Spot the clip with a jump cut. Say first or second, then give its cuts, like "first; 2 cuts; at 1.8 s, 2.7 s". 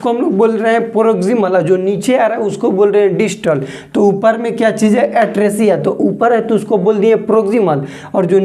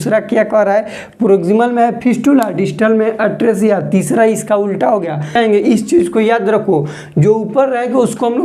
second; 1 cut; at 5.3 s